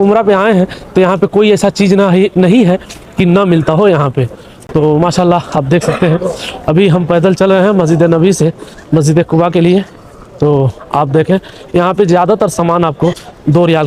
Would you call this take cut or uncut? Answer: uncut